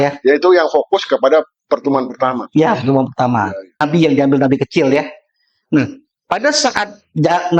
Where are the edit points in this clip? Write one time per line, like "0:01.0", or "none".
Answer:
0:03.8

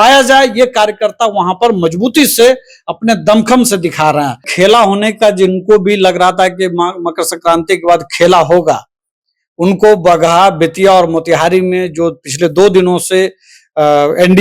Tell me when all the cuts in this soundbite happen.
0:04.5

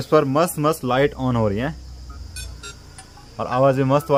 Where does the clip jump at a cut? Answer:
none

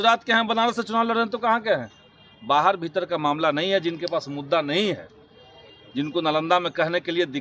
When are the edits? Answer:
none

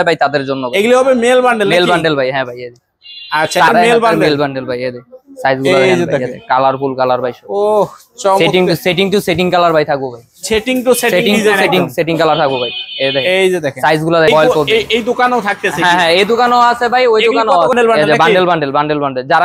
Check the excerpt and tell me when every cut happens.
0:03.7
0:14.3
0:17.7

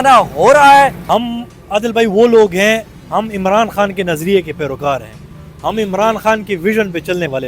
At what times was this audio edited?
0:01.0

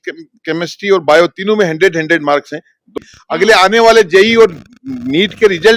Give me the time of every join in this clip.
0:02.9

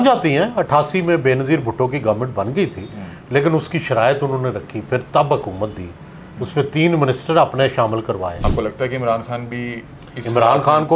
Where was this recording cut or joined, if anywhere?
0:08.4

